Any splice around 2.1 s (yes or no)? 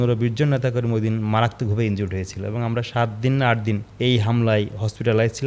no